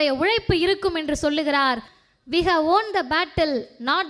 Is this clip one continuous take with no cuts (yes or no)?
no